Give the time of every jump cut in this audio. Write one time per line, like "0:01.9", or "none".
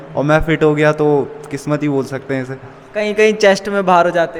none

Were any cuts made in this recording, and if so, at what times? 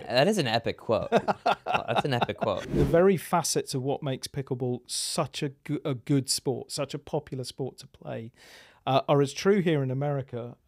0:02.7

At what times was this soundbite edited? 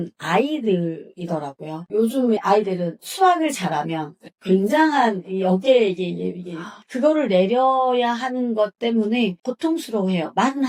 none

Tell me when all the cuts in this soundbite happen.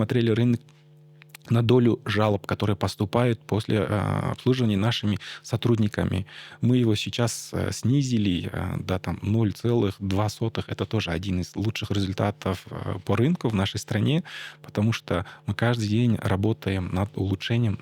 none

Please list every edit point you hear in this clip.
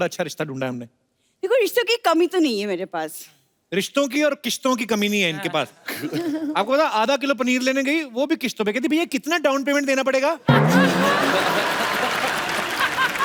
none

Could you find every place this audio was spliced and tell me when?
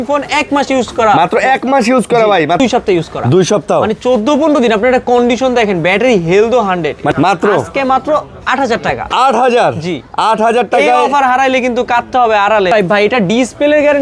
0:02.6
0:07.1
0:12.7

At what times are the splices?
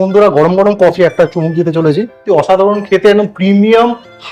0:00.9
0:02.2

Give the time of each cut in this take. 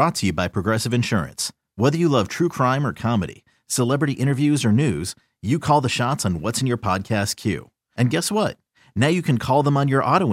none

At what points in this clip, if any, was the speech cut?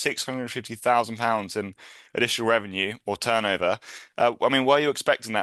none

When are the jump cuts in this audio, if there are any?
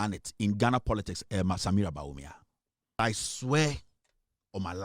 0:03.0

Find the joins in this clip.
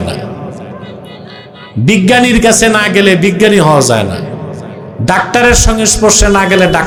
none

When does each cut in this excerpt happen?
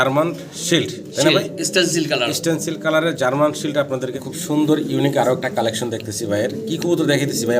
0:04.1

